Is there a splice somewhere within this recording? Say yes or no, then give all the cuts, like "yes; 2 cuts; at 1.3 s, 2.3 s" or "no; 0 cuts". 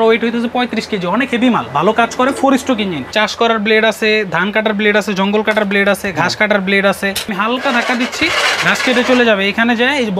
yes; 2 cuts; at 3.1 s, 7.3 s